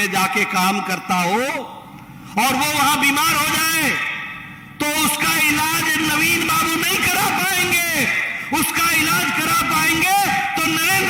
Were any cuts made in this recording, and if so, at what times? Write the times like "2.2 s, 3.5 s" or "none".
none